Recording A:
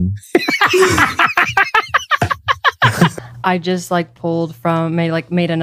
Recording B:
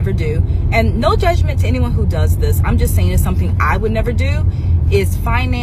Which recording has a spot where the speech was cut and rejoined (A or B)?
A